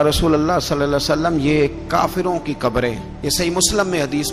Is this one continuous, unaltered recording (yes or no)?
yes